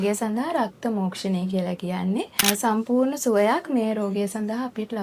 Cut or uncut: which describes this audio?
cut